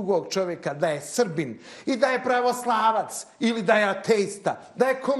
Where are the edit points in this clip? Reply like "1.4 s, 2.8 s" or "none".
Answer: none